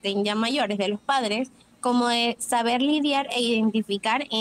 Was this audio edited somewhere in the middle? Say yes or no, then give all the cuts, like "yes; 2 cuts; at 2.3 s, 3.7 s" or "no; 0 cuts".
yes; 1 cut; at 1.6 s